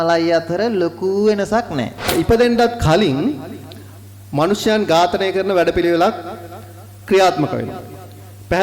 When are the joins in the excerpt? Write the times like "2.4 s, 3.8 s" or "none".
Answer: 2.1 s